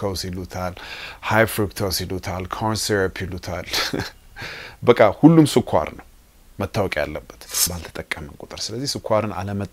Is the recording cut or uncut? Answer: cut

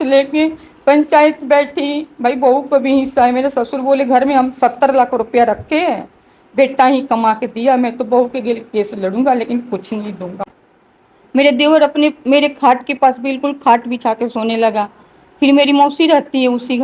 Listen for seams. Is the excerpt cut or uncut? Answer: cut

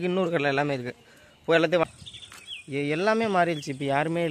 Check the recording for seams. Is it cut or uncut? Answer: cut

